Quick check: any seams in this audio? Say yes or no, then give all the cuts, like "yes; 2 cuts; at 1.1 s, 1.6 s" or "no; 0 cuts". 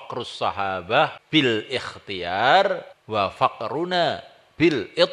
yes; 2 cuts; at 1.2 s, 2.9 s